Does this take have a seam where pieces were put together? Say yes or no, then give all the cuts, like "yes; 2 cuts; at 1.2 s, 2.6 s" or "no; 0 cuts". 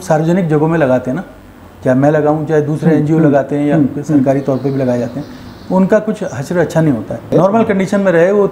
yes; 1 cut; at 7.2 s